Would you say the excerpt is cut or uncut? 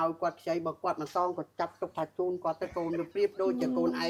uncut